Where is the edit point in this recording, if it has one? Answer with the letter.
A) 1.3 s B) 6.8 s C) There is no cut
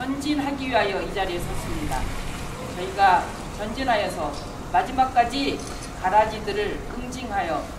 B